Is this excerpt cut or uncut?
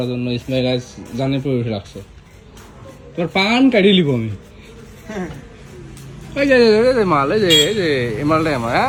uncut